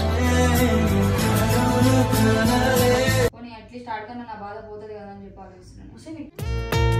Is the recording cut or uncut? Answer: cut